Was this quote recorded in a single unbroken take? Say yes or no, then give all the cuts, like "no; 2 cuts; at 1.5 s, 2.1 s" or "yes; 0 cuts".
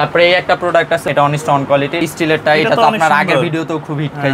no; 2 cuts; at 1.0 s, 2.0 s